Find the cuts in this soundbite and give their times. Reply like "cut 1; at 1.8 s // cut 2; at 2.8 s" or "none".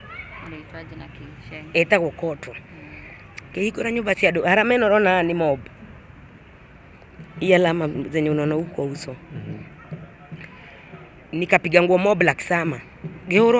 none